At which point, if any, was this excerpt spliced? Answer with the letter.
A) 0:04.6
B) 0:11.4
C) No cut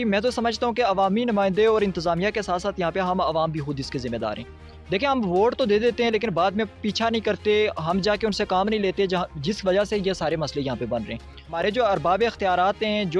B